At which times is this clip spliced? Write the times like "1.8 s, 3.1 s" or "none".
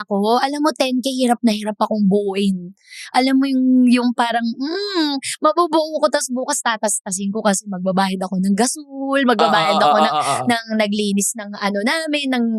none